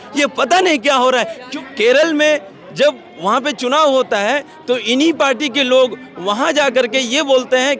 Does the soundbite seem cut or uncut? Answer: cut